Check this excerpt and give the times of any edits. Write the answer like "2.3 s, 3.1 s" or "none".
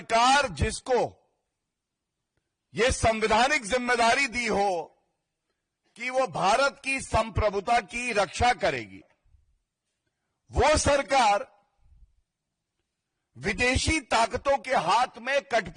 none